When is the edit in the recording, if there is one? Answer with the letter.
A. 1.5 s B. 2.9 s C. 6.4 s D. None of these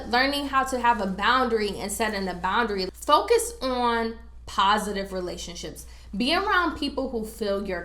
B